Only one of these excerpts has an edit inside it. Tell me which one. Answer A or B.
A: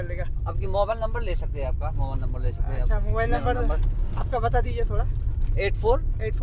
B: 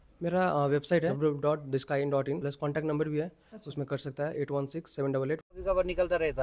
B